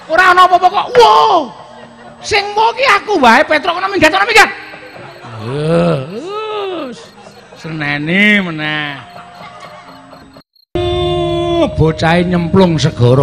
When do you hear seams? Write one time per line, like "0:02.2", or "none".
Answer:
0:10.7